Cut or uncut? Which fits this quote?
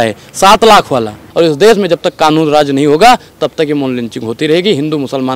cut